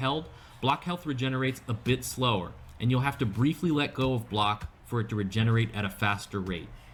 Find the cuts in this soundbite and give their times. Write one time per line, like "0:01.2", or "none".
none